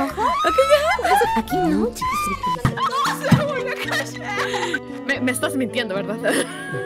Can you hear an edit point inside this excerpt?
yes; 1 cut; at 2.7 s

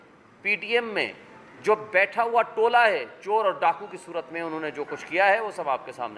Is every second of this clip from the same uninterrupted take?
yes; 0 cuts

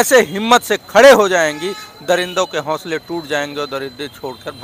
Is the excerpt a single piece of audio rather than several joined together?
yes; 0 cuts

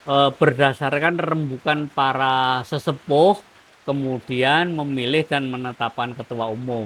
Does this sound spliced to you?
no; 0 cuts

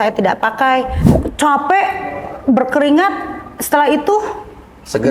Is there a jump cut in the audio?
yes; 1 cut; at 0.9 s

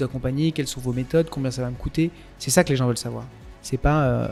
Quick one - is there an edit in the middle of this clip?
no; 0 cuts

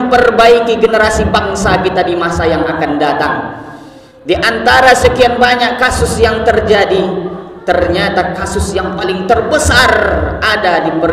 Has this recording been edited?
no; 0 cuts

